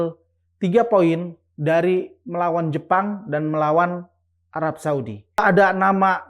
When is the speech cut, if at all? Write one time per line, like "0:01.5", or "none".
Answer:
0:05.4